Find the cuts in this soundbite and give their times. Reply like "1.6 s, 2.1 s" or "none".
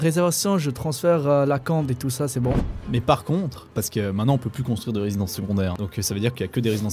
2.7 s, 3.7 s, 5.7 s